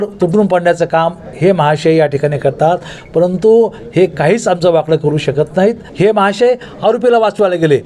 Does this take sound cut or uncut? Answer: cut